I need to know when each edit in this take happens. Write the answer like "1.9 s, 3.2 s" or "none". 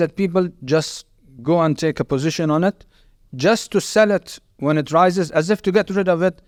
none